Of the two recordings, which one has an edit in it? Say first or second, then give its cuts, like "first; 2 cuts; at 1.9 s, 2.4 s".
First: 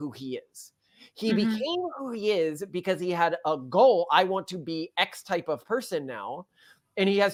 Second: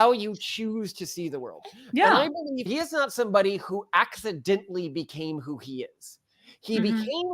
second; 1 cut; at 2.7 s